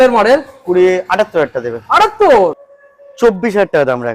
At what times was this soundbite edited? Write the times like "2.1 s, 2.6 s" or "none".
2.7 s